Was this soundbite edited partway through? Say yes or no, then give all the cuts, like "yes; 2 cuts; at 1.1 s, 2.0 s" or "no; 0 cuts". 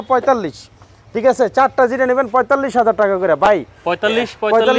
no; 0 cuts